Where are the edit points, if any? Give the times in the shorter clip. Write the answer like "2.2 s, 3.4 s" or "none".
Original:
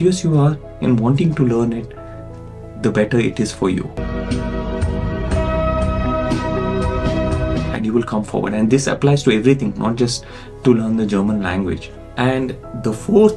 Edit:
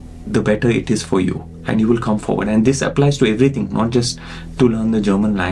1.6 s